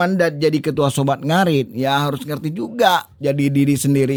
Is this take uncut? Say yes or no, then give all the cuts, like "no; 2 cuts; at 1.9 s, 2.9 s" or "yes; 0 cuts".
yes; 0 cuts